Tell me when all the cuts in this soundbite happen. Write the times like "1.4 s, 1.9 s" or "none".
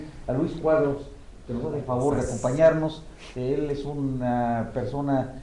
none